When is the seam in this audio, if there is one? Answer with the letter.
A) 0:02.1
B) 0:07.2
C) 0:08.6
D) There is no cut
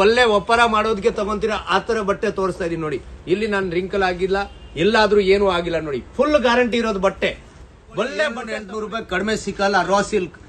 C